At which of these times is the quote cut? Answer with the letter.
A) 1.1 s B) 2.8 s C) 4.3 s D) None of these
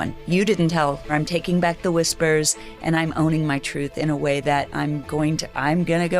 A